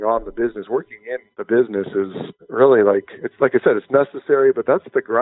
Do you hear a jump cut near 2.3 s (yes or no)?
no